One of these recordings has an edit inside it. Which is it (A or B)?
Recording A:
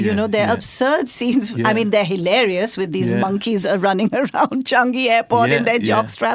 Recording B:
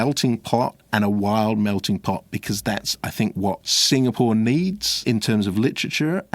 B